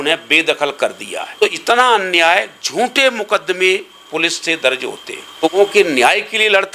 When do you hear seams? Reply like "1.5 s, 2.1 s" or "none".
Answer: 1.4 s, 5.4 s